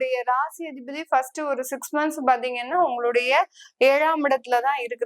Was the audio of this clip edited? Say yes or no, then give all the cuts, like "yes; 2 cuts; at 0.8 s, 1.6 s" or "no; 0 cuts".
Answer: no; 0 cuts